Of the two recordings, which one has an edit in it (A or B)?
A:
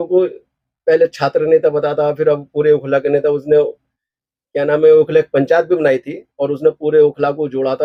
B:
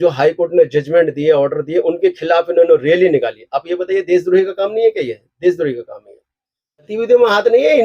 B